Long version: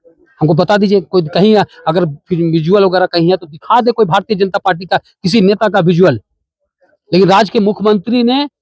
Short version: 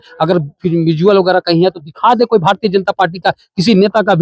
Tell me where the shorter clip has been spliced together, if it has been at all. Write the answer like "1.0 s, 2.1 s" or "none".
none